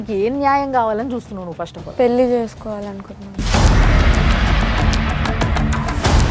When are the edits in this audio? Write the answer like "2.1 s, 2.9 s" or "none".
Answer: none